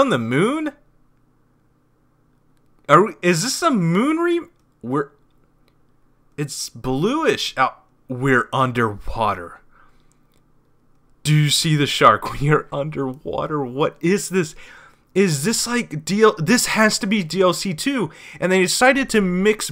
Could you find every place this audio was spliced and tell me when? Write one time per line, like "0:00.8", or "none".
none